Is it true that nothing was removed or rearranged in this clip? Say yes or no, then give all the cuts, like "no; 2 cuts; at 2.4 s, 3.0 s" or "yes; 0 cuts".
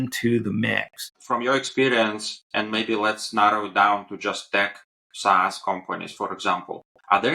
no; 1 cut; at 1.1 s